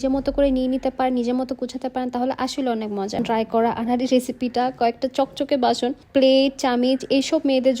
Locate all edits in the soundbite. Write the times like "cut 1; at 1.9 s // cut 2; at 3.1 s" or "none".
cut 1; at 3.2 s